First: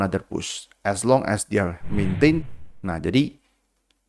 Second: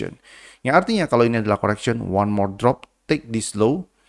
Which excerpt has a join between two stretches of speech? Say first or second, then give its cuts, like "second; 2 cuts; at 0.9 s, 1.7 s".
first; 1 cut; at 2.5 s